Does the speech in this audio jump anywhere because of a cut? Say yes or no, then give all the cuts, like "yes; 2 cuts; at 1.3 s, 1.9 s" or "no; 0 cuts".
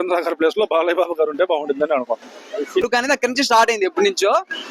yes; 1 cut; at 2.8 s